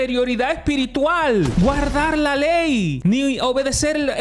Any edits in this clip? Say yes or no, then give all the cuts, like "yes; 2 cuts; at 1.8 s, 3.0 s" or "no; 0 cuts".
yes; 2 cuts; at 1.5 s, 2.9 s